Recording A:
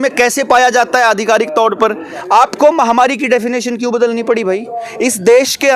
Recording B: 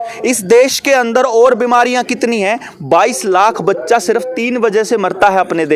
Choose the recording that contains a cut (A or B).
A